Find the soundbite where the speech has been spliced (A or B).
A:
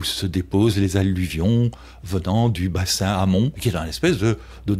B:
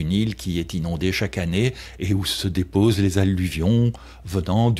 A